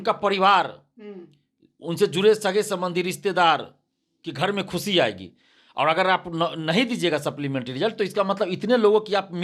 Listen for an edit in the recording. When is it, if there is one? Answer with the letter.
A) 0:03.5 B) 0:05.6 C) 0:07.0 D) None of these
D